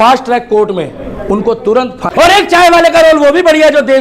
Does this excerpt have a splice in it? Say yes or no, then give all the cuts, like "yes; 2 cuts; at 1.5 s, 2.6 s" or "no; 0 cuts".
yes; 1 cut; at 2.1 s